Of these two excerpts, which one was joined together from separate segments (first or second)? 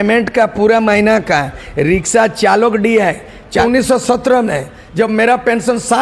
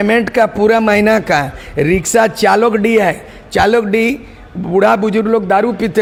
first